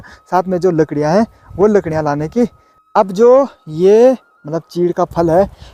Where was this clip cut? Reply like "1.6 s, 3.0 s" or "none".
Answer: 2.7 s